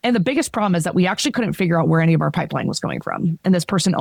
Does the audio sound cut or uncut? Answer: uncut